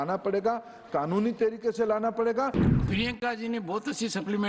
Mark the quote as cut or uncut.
cut